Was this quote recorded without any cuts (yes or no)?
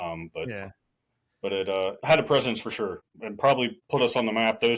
no